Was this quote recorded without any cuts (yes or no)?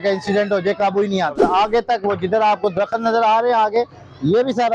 no